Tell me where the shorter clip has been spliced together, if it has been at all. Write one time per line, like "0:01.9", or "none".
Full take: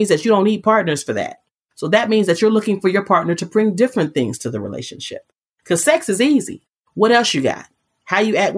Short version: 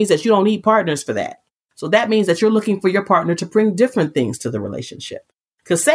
none